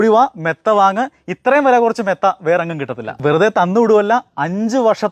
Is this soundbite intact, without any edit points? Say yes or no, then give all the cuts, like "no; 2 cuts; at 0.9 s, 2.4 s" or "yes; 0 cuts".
no; 1 cut; at 3.2 s